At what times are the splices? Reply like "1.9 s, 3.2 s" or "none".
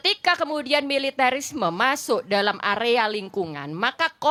none